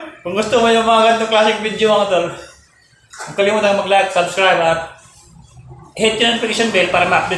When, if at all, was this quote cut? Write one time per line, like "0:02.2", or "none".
none